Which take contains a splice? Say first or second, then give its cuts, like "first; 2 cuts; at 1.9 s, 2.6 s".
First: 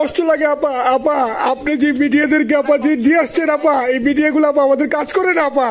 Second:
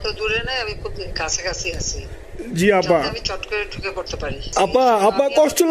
second; 1 cut; at 4.4 s